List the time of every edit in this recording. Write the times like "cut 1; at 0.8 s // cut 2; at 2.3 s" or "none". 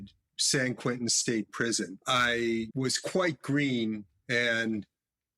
cut 1; at 2.0 s // cut 2; at 2.7 s